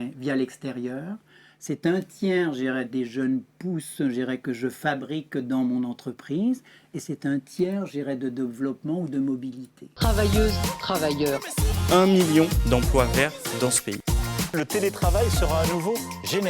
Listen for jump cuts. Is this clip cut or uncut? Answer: cut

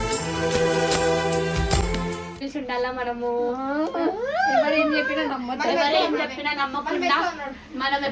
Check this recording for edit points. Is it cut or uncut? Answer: uncut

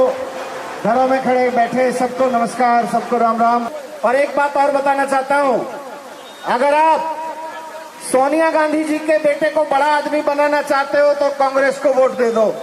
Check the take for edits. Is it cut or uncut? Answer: cut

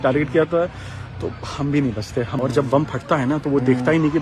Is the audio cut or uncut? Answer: cut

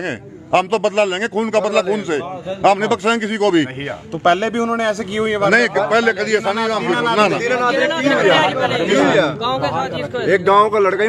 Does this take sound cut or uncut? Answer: uncut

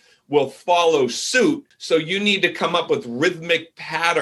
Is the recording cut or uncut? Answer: cut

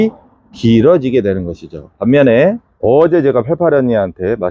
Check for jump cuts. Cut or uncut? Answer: uncut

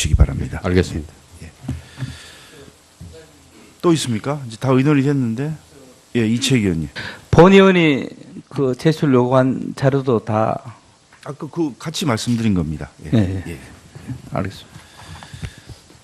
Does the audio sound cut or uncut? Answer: cut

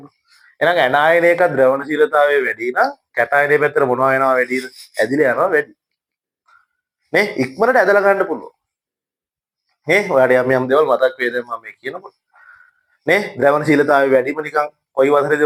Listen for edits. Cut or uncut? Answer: uncut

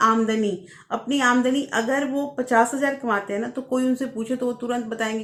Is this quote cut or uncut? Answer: uncut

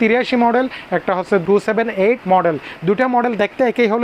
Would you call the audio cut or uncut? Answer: uncut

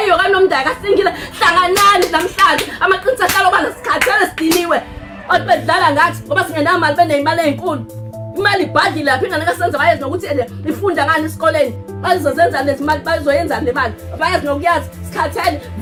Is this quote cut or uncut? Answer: uncut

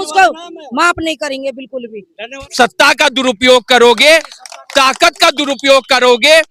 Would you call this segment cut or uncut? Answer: cut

